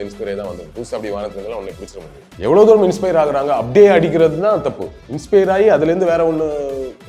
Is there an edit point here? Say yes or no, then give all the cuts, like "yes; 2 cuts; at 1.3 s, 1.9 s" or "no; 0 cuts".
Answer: yes; 1 cut; at 2.2 s